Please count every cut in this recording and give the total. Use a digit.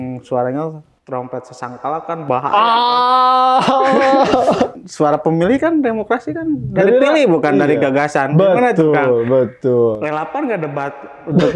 1